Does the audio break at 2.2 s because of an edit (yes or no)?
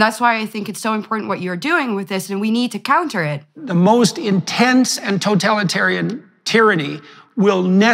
no